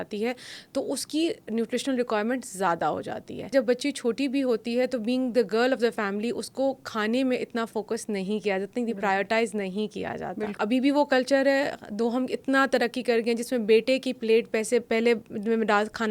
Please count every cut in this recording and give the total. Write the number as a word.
two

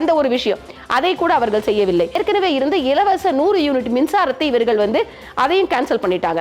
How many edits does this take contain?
one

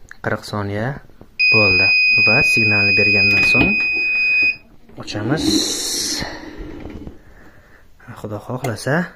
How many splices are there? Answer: zero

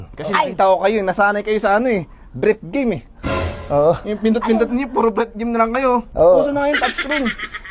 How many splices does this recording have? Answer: zero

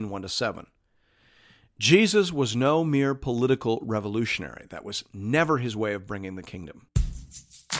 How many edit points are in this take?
one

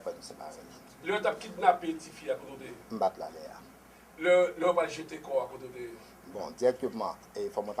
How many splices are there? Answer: one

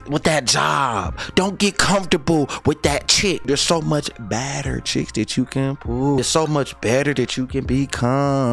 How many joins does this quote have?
two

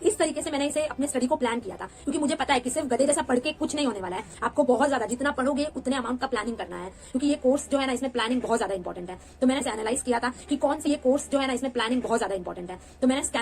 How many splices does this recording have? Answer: two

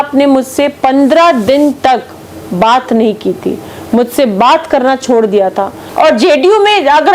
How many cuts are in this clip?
one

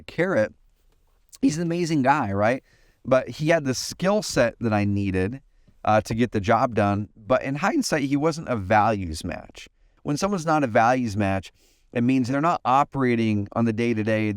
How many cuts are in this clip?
two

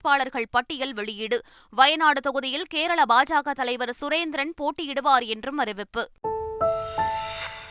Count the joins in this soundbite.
one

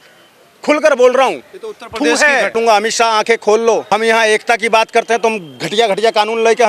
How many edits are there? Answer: two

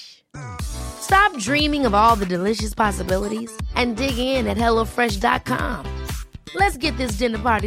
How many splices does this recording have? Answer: zero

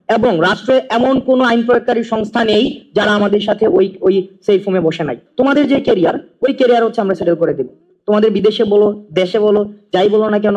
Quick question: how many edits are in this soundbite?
one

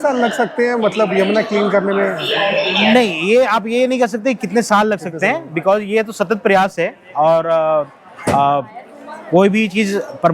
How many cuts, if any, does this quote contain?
zero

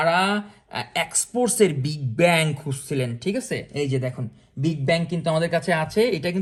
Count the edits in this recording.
zero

